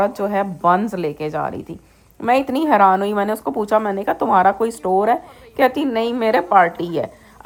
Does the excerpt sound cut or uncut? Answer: uncut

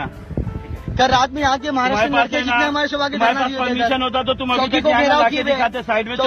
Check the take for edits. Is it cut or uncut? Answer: uncut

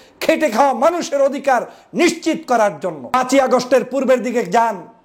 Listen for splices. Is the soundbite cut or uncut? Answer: cut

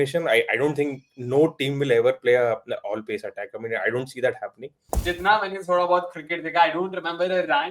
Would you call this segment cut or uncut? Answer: cut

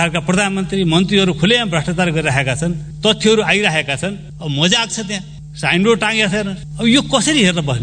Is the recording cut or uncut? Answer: uncut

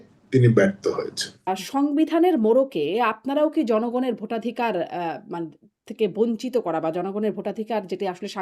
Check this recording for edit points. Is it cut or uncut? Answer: cut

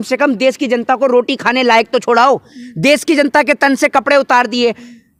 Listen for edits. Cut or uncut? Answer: uncut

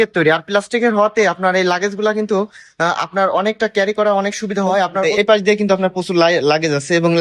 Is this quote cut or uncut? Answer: cut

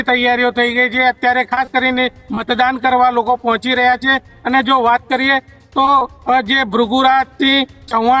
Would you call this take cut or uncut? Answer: uncut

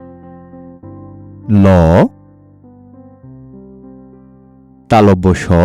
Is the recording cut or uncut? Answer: uncut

